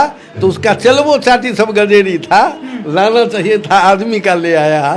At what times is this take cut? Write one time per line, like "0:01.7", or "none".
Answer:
none